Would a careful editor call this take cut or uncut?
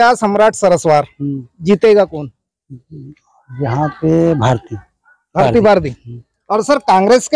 uncut